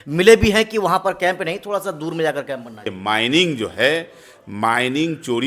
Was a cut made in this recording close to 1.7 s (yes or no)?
no